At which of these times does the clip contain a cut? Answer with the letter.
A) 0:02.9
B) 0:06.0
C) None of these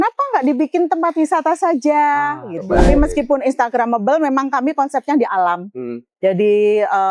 A